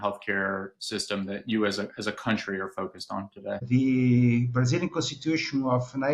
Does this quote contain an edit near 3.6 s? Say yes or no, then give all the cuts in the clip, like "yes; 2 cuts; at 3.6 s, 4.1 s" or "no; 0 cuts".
yes; 1 cut; at 3.6 s